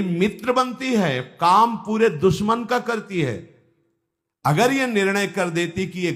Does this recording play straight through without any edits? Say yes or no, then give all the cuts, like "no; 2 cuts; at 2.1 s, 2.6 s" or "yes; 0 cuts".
yes; 0 cuts